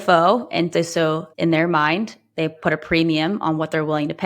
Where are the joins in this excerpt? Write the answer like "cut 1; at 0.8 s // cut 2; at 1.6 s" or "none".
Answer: cut 1; at 1.3 s